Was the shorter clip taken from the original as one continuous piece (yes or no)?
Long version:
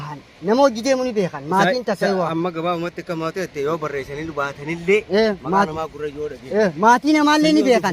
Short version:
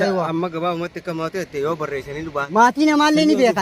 no